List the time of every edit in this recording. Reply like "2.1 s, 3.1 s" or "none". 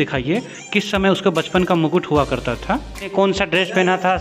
3.1 s